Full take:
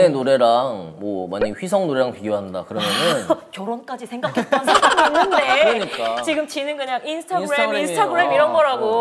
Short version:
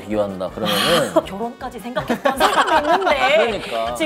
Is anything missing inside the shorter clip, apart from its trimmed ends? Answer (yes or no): yes